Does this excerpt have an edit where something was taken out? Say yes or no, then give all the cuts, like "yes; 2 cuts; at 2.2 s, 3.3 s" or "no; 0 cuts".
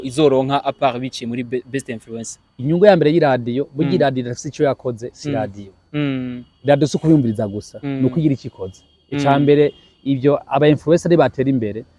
no; 0 cuts